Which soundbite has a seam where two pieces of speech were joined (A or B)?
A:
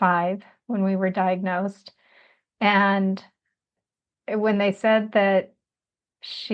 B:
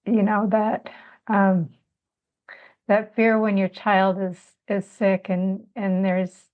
A